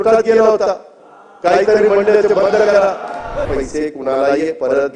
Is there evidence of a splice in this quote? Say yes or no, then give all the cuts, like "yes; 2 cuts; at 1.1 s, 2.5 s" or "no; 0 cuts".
yes; 1 cut; at 3.5 s